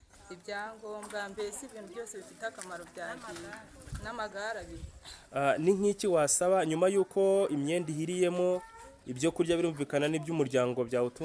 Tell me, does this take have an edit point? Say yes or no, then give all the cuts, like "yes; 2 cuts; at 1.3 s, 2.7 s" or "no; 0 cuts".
no; 0 cuts